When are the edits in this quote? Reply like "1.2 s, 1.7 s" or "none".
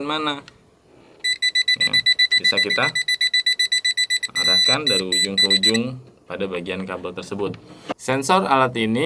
7.9 s

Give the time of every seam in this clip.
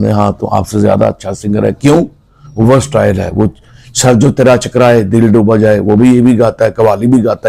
none

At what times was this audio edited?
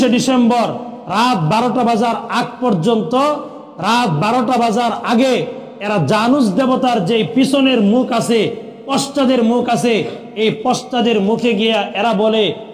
none

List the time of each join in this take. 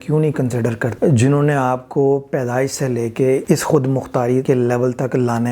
0.9 s, 3.4 s, 4.4 s

